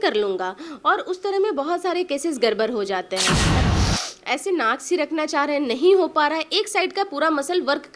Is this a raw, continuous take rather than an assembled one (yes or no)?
no